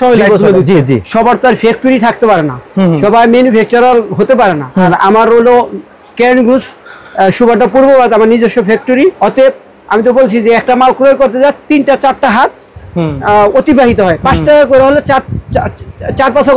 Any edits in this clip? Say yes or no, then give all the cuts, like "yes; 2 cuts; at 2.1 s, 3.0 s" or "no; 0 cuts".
yes; 3 cuts; at 1.1 s, 4.9 s, 9.2 s